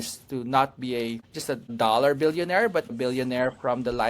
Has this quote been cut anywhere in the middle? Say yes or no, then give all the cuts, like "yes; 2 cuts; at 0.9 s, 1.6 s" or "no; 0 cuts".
yes; 2 cuts; at 1.7 s, 2.9 s